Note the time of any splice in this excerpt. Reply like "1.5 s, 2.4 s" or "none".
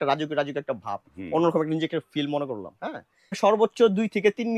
3.3 s

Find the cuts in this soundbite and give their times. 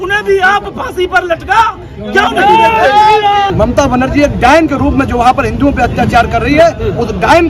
3.5 s

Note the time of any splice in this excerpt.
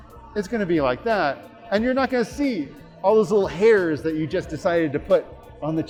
none

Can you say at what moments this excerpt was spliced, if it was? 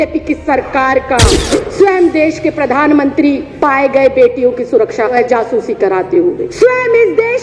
1.2 s, 3.5 s, 5.1 s, 6.5 s

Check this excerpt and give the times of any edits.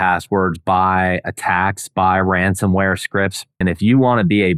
3.6 s

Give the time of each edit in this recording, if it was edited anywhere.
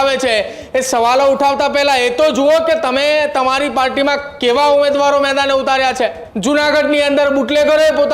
6.3 s

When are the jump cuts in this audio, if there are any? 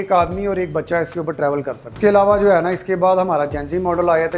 1.9 s

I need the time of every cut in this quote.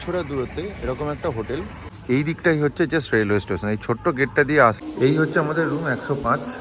1.9 s, 4.8 s

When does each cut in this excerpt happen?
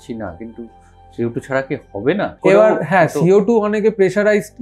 2.3 s

